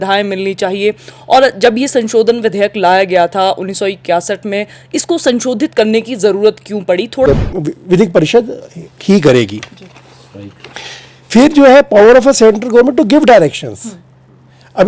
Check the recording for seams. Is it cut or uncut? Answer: cut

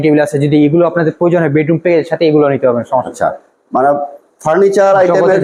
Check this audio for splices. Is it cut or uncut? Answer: uncut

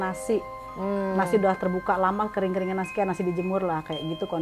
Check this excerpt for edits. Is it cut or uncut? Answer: uncut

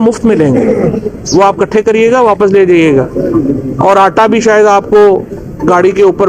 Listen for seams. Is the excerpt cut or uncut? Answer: uncut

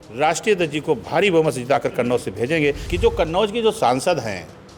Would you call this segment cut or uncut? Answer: cut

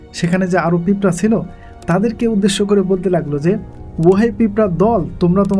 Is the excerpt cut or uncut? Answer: cut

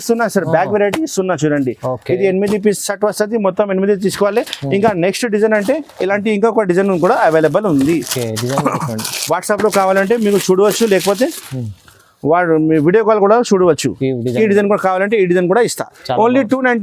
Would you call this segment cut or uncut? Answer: uncut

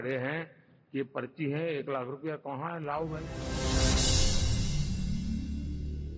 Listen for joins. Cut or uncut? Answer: cut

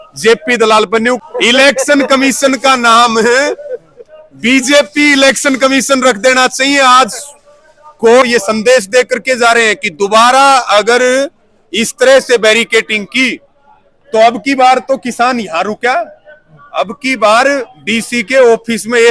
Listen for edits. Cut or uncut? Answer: cut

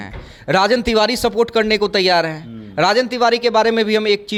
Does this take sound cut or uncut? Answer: uncut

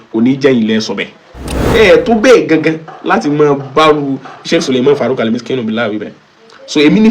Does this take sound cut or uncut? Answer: cut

